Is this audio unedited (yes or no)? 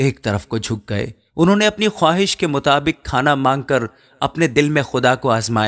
no